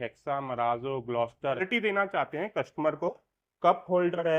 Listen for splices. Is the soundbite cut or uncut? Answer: cut